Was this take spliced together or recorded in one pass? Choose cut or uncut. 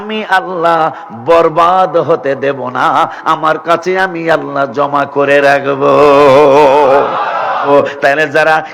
cut